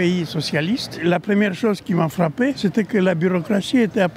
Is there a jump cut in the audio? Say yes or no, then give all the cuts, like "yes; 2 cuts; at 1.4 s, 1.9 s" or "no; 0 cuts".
yes; 2 cuts; at 1.0 s, 2.6 s